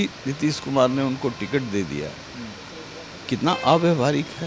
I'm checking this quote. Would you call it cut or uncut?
uncut